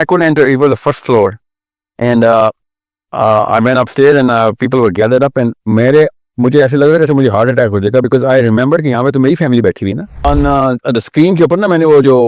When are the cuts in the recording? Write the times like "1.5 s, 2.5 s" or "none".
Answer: 10.1 s